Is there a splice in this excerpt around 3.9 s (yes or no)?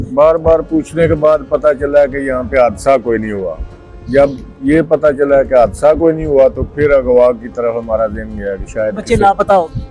no